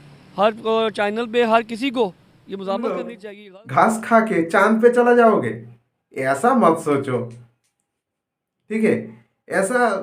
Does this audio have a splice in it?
yes; 1 cut; at 3.1 s

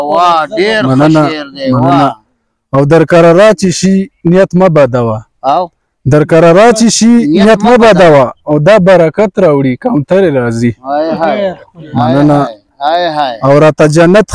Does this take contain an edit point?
no; 0 cuts

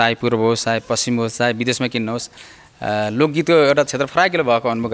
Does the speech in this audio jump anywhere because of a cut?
no; 0 cuts

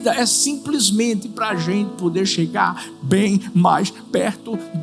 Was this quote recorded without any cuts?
yes; 0 cuts

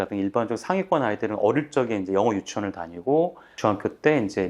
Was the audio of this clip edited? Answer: yes; 1 cut; at 3.4 s

